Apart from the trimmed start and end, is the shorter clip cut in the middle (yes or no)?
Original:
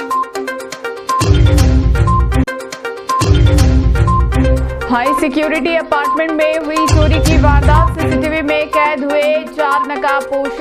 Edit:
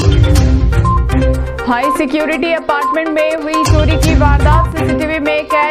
yes